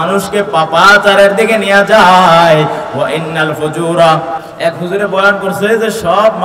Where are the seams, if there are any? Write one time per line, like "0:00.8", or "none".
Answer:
0:04.4